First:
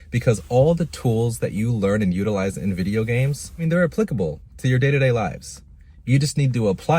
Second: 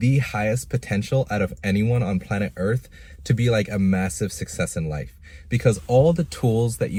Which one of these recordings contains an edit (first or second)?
first